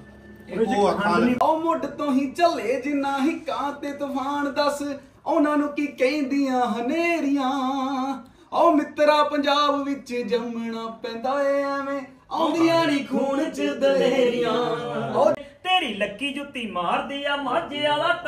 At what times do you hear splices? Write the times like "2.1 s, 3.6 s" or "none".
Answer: 1.4 s, 15.4 s